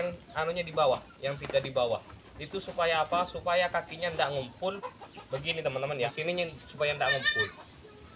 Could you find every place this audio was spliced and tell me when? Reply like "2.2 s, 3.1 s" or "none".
6.1 s